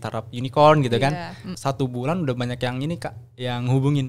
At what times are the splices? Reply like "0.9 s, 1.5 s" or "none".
1.5 s